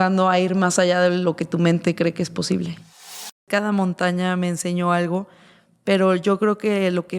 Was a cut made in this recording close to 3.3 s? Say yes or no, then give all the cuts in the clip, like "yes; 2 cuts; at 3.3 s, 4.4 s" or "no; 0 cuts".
yes; 1 cut; at 3.3 s